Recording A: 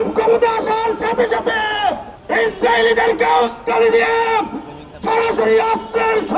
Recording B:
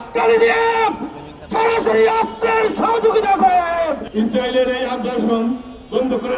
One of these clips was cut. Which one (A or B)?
B